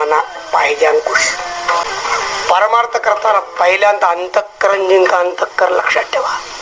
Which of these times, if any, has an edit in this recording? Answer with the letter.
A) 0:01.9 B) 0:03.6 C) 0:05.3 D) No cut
A